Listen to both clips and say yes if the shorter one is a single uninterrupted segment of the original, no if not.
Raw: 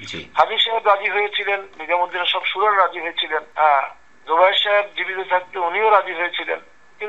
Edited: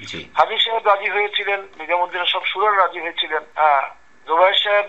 yes